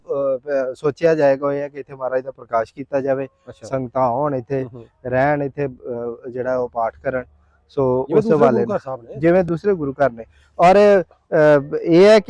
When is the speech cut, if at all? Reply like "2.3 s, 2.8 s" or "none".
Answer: none